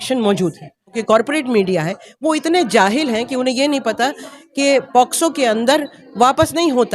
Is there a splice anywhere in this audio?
yes; 1 cut; at 1.0 s

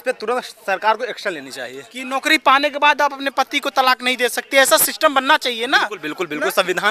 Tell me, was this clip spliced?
no; 0 cuts

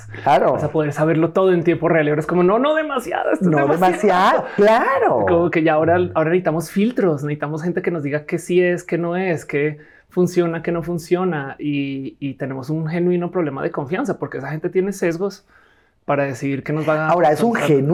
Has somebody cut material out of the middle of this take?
no; 0 cuts

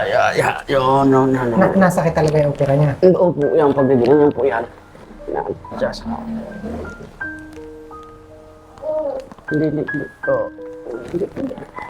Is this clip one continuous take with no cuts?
yes; 0 cuts

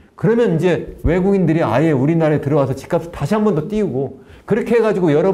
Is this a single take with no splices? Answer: yes; 0 cuts

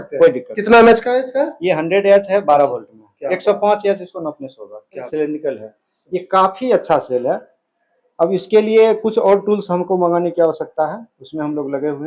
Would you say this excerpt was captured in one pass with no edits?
no; 1 cut; at 5.1 s

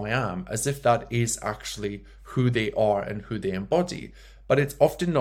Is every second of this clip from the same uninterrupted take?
yes; 0 cuts

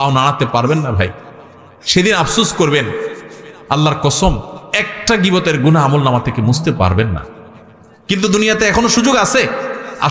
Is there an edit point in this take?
no; 0 cuts

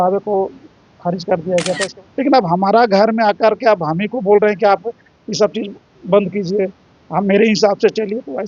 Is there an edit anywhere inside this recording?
yes; 1 cut; at 1.9 s

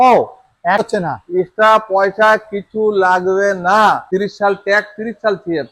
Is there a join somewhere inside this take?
yes; 2 cuts; at 0.8 s, 4.0 s

